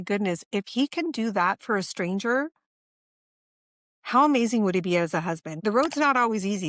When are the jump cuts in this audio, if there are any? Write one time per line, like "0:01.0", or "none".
0:05.5